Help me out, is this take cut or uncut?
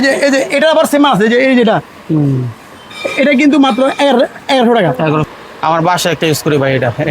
cut